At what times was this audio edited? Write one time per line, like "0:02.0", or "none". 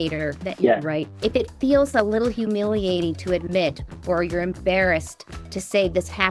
none